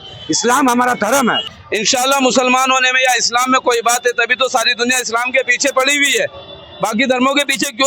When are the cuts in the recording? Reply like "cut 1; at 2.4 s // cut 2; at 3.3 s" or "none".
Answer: cut 1; at 1.5 s